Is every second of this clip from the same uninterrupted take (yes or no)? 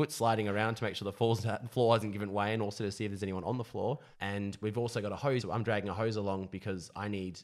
no